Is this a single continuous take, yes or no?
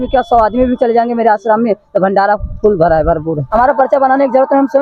no